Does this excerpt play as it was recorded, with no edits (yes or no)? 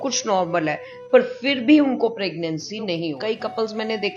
no